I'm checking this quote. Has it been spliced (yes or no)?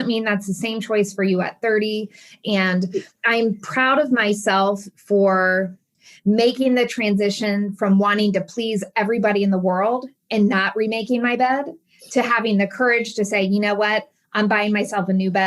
yes